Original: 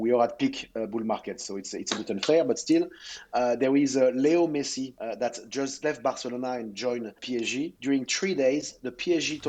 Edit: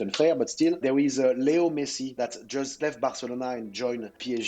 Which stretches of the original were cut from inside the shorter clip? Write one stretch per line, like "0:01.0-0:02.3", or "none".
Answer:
0:02.9-0:03.6
0:04.9-0:05.2